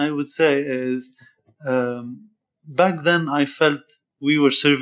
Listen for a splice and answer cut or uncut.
uncut